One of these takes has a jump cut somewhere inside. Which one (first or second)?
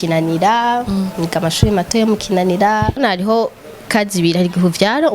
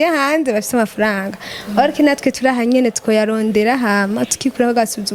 first